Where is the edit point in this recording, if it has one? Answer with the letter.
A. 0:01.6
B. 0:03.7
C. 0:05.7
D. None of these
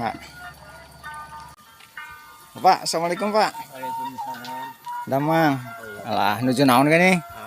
A